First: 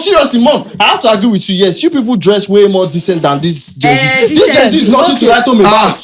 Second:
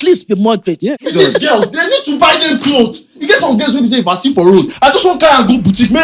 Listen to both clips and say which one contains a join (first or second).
second